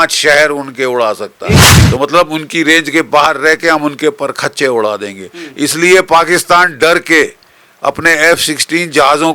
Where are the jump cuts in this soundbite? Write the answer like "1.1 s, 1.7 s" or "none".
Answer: 1.7 s